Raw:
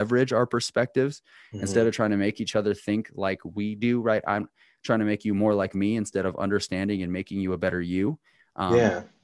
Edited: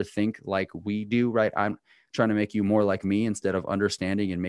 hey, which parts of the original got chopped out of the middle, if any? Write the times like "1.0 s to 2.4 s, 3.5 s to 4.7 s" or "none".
none